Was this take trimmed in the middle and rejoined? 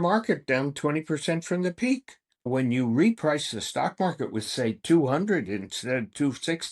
yes; 1 cut; at 2.5 s

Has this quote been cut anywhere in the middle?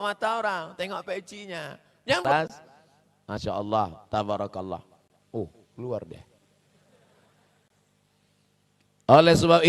yes; 1 cut; at 2.2 s

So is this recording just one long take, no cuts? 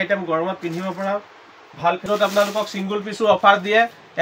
no; 1 cut; at 2.0 s

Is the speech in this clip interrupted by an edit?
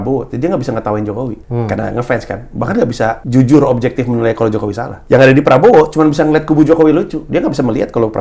yes; 3 cuts; at 1.4 s, 3.2 s, 4.9 s

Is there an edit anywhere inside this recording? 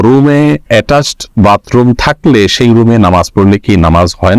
no; 0 cuts

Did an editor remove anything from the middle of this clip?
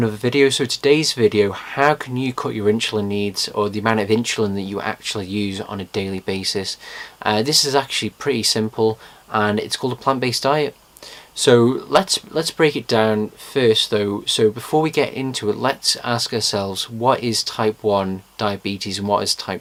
no; 0 cuts

